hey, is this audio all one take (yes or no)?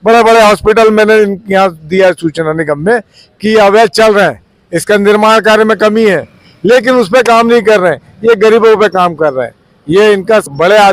yes